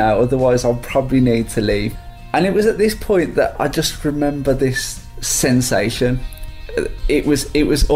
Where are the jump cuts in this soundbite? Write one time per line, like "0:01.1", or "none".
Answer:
0:01.9